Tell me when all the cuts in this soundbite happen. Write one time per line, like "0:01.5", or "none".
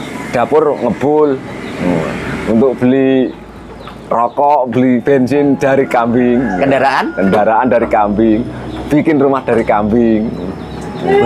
none